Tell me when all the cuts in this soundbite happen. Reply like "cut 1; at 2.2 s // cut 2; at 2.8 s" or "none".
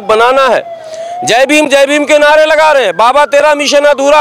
none